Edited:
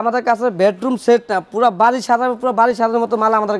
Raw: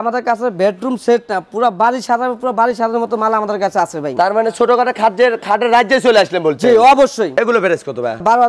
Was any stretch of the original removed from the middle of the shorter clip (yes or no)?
no